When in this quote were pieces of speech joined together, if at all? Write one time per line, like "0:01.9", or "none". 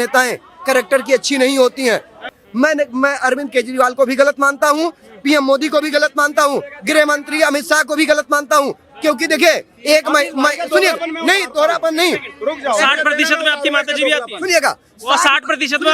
0:02.3